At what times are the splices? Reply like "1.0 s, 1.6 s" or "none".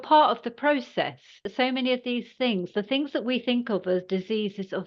1.5 s